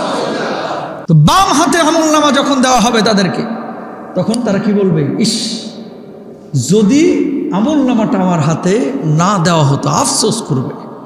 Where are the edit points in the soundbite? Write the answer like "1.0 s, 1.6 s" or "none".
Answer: 0.9 s